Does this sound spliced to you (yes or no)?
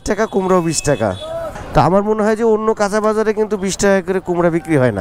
no